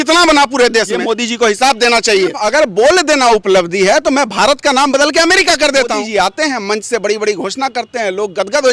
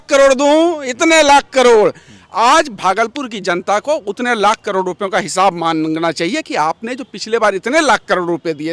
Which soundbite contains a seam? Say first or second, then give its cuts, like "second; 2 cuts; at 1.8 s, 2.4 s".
first; 3 cuts; at 0.9 s, 2.4 s, 6.0 s